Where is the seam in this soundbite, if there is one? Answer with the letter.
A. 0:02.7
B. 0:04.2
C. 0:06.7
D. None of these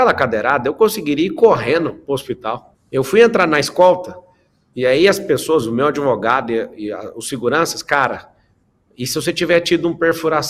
A